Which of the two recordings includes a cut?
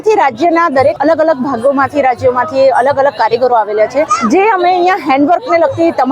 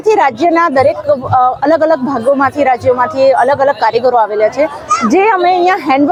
first; 2 cuts; at 1.0 s, 4.2 s

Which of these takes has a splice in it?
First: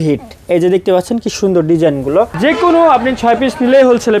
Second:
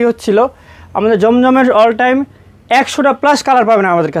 first; 1 cut; at 2.3 s

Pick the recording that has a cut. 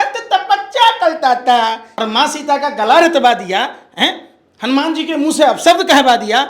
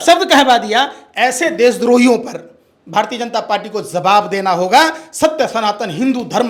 first; 1 cut; at 1.9 s

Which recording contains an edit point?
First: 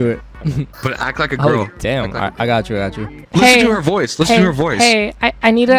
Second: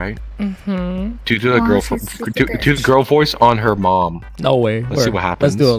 first; 1 cut; at 3.1 s

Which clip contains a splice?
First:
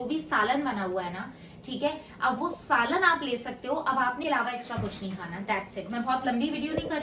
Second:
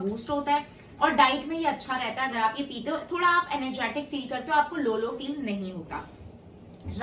first; 1 cut; at 4.2 s

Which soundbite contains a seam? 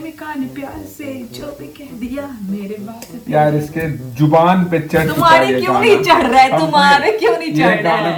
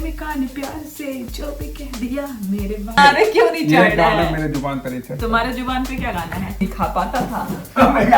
second; 2 cuts; at 3.0 s, 6.6 s

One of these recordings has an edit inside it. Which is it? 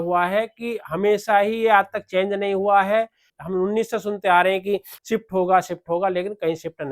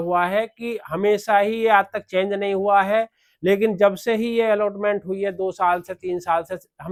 first; 2 cuts; at 3.2 s, 4.9 s

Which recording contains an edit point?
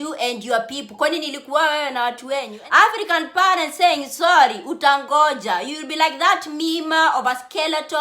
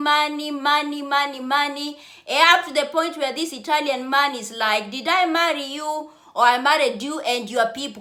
first; 1 cut; at 2.5 s

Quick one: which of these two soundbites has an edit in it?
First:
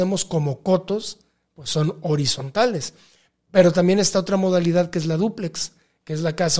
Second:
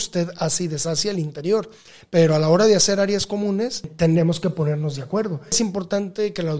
second; 2 cuts; at 3.9 s, 5.6 s

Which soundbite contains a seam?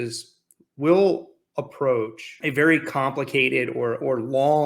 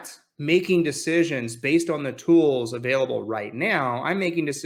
first; 1 cut; at 2.2 s

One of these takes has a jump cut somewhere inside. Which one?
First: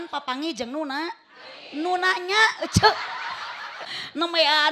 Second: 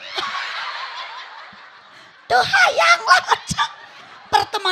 first; 1 cut; at 3.8 s

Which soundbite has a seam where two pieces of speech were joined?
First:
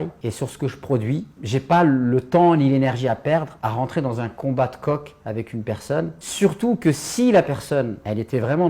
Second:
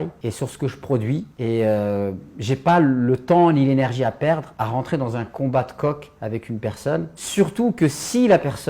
first; 1 cut; at 1.3 s

